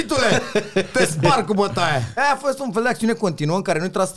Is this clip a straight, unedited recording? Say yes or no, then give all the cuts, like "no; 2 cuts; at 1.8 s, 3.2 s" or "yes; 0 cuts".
no; 1 cut; at 2.1 s